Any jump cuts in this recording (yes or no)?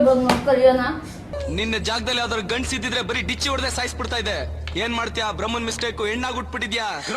yes